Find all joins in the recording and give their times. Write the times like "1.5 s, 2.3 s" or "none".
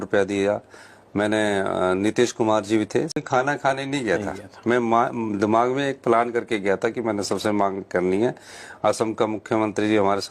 3.2 s